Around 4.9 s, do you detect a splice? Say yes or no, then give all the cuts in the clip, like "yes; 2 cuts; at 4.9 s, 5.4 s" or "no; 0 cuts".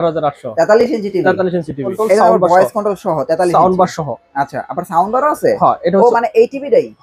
no; 1 cut; at 1.9 s